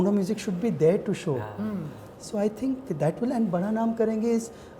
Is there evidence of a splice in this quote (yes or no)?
no